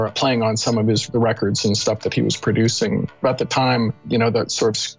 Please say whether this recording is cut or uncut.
cut